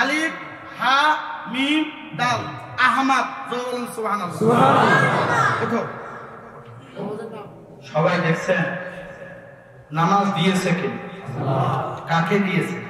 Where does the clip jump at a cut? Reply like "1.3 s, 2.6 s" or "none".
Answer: none